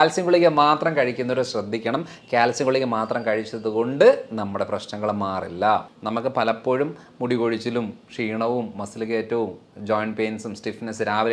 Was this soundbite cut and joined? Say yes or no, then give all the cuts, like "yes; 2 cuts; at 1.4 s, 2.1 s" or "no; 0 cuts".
yes; 1 cut; at 6.0 s